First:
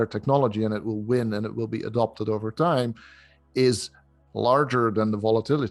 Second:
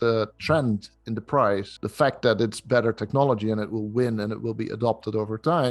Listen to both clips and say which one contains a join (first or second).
second